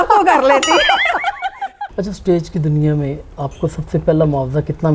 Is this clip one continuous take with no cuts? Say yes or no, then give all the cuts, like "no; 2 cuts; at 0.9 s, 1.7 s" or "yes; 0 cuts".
no; 1 cut; at 1.7 s